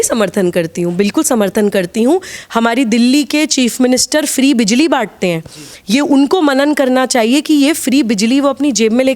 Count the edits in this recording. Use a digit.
1